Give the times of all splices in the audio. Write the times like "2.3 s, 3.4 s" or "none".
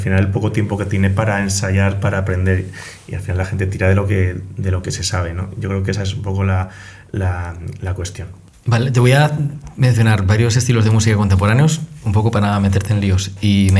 8.4 s